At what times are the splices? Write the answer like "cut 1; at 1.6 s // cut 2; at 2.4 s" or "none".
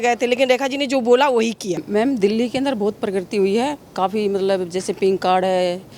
cut 1; at 1.8 s